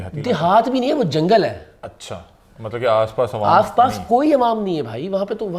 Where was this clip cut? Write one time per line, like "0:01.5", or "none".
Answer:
none